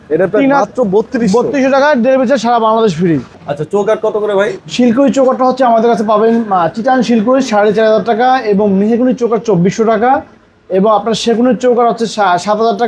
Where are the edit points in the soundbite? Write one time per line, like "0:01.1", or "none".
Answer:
0:03.4